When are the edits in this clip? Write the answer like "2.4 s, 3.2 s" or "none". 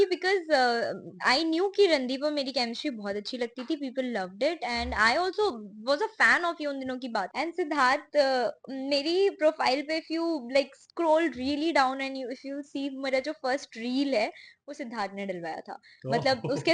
7.3 s